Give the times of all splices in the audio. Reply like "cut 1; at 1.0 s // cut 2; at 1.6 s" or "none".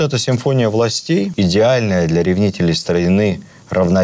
cut 1; at 1.3 s